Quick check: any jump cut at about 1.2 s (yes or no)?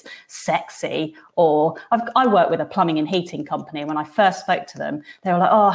no